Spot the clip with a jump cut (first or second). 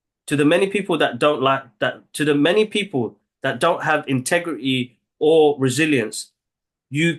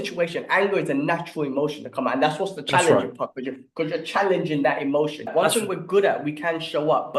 second